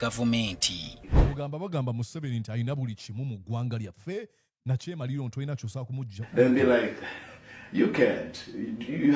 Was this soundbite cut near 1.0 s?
yes; 1 cut; at 1.0 s

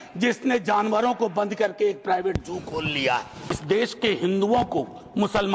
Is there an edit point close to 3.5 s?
yes; 1 cut; at 3.5 s

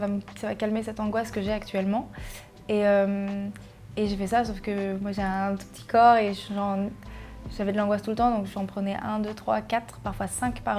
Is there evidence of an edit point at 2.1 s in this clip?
no; 0 cuts

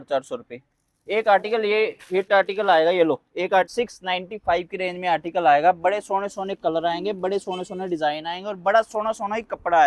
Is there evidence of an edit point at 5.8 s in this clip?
no; 1 cut; at 3.7 s

